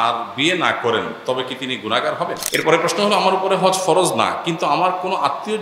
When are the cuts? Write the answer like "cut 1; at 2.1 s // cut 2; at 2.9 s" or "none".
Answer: cut 1; at 2.4 s